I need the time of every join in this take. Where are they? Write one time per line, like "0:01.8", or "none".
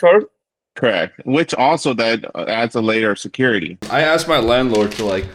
0:03.8